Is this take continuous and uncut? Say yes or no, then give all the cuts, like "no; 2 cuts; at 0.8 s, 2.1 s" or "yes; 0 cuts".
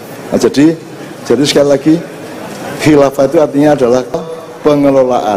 no; 1 cut; at 4.2 s